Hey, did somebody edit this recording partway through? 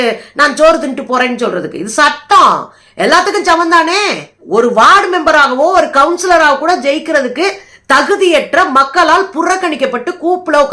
yes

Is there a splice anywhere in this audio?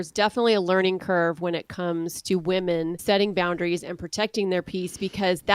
yes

